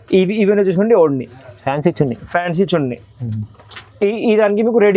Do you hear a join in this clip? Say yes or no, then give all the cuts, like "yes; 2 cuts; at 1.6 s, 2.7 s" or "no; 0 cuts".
no; 0 cuts